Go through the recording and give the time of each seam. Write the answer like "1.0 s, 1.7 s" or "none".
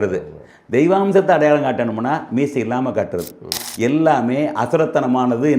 3.6 s